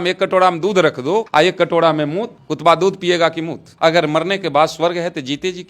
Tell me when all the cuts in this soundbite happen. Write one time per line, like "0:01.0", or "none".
0:01.3
0:03.7